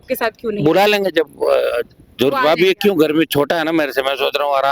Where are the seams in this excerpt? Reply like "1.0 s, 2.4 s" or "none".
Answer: none